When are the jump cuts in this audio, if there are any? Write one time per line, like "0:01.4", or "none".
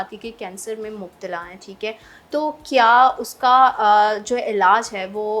none